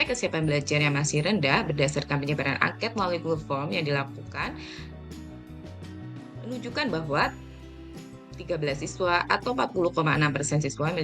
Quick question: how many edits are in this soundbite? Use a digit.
2